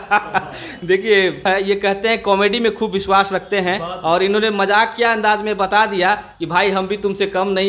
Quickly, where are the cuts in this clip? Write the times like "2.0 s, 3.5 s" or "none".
1.4 s